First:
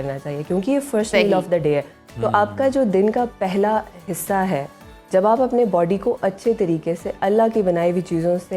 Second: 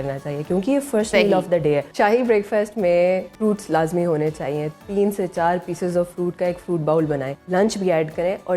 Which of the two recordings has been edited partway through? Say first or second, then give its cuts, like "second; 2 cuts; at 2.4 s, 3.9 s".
second; 3 cuts; at 1.9 s, 3.3 s, 7.3 s